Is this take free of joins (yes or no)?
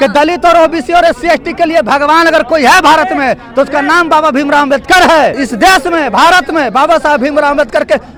yes